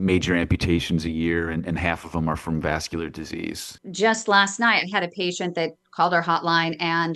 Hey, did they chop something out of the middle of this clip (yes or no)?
yes